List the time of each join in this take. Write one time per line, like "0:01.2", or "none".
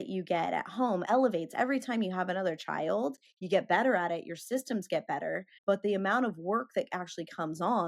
0:01.0
0:05.5